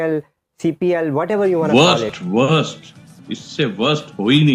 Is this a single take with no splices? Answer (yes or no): no